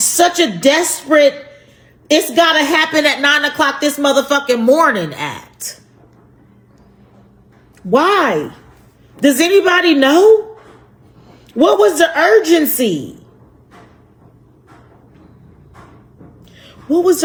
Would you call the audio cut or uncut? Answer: uncut